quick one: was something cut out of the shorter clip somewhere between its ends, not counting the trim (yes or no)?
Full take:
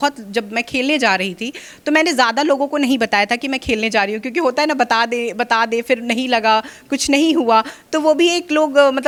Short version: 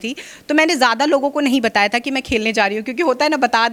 no